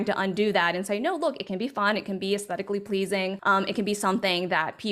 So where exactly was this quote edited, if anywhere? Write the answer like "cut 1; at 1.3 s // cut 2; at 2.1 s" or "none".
cut 1; at 3.4 s